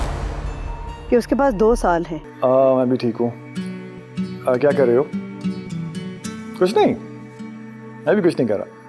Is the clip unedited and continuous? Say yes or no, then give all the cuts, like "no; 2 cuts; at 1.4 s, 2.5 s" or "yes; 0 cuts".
no; 1 cut; at 2.2 s